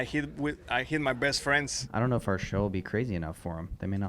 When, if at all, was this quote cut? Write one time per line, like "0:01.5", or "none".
0:01.8